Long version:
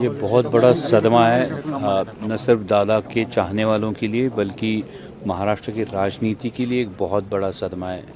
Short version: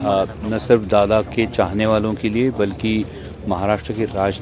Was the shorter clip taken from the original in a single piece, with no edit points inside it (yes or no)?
yes